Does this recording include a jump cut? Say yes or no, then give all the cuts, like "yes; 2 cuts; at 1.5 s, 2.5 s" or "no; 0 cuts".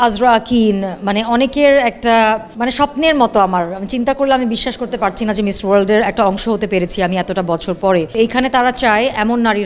yes; 2 cuts; at 2.5 s, 8.2 s